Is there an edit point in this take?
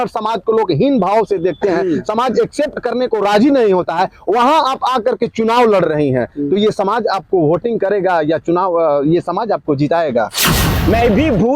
yes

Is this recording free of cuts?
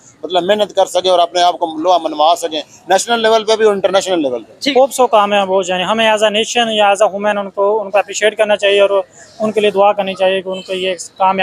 no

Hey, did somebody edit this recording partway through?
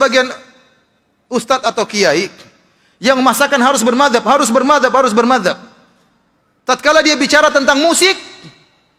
no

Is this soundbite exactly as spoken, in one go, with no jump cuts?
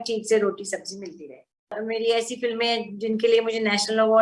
no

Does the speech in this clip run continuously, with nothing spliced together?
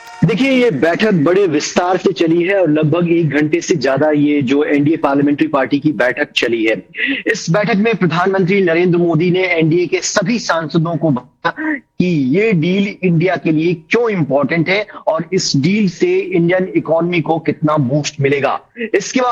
yes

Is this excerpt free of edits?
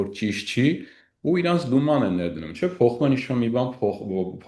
yes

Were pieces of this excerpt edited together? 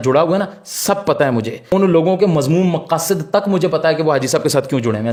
no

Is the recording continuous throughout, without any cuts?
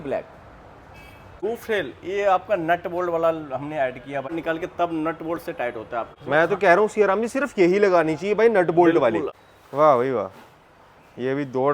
no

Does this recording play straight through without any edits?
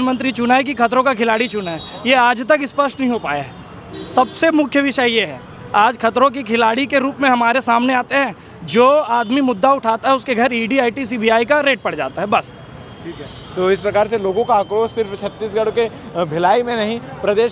yes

